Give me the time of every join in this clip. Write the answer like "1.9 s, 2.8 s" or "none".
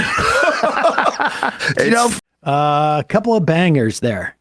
2.1 s

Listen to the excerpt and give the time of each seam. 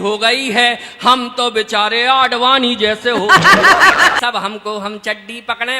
4.2 s

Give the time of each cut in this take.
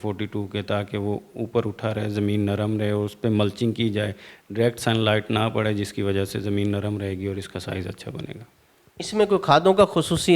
none

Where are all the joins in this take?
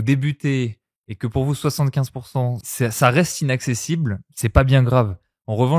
2.6 s

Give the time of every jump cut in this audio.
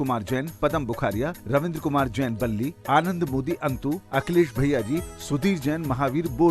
none

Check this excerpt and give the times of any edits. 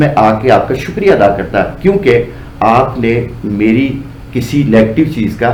none

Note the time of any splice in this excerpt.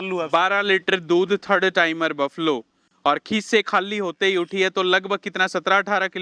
none

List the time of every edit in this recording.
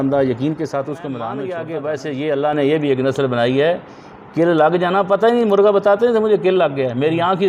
1.5 s

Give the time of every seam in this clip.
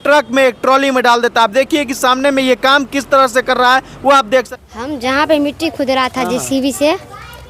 4.5 s

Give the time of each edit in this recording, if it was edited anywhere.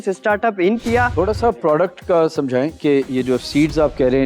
1.1 s

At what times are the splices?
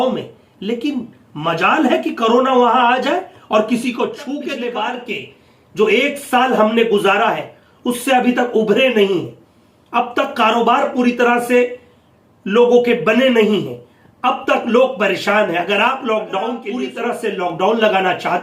4.2 s, 16.9 s

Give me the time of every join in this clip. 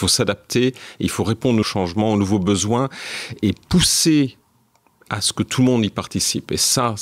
1.6 s, 3.4 s

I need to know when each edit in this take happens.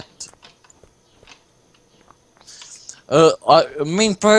2.9 s

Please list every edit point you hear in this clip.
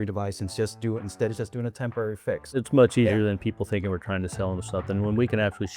2.5 s

